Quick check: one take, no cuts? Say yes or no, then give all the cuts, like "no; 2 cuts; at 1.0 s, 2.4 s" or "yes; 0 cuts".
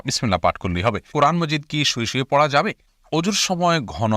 no; 2 cuts; at 1.1 s, 2.9 s